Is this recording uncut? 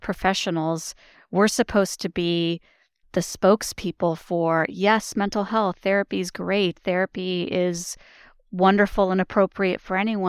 no; 1 cut; at 3.1 s

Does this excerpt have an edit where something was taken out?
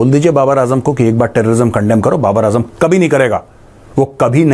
no; 0 cuts

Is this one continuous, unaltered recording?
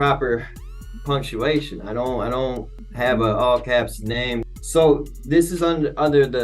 no; 2 cuts; at 2.8 s, 4.4 s

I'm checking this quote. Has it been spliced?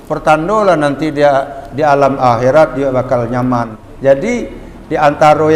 yes; 1 cut; at 3.8 s

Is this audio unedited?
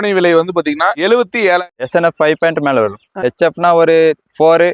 no; 1 cut; at 1.6 s

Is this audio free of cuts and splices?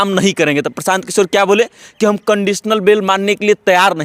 yes; 0 cuts

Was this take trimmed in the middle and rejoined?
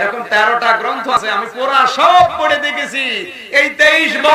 yes; 1 cut; at 1.2 s

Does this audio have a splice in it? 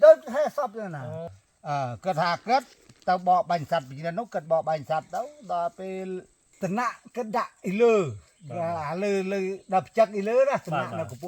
yes; 2 cuts; at 1.2 s, 6.4 s

